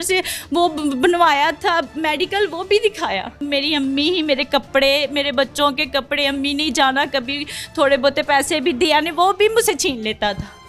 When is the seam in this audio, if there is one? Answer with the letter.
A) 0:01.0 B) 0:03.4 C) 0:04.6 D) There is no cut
B